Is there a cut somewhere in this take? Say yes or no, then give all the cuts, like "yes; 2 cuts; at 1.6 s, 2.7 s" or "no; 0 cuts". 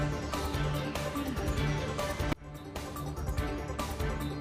no; 0 cuts